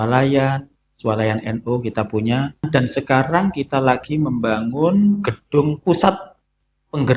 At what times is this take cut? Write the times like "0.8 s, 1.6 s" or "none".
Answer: 2.7 s